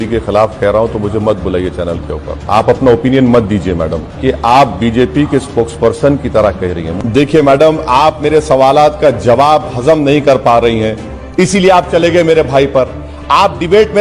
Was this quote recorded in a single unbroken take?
no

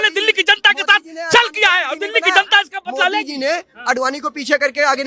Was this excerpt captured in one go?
yes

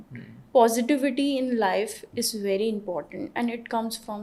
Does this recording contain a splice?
no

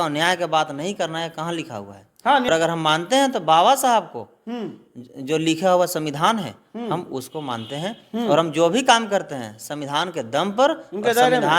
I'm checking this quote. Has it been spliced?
yes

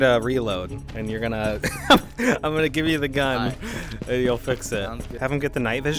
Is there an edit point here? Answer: yes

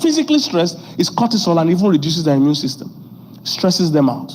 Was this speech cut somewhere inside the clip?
no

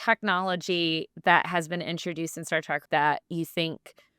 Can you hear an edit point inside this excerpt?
yes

